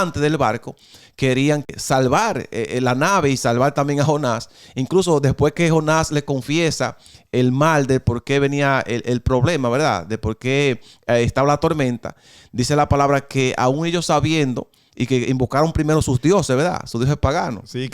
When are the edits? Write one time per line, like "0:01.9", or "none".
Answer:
0:01.7